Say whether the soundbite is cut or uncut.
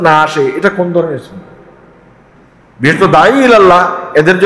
uncut